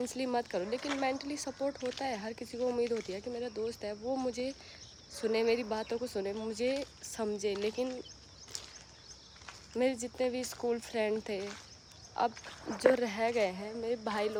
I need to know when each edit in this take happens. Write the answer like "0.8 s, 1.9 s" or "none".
none